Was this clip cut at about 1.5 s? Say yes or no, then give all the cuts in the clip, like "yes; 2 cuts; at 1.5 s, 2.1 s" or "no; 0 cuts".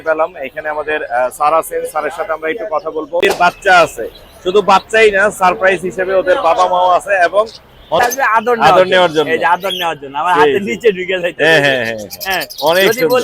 no; 2 cuts; at 3.3 s, 8.0 s